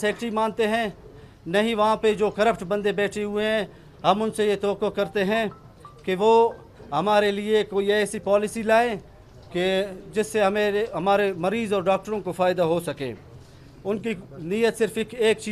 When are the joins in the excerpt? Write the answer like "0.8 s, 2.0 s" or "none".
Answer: none